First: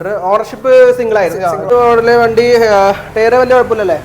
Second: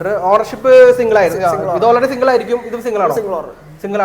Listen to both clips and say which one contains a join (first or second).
first